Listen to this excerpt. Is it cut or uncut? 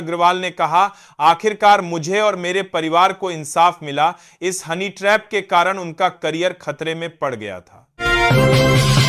cut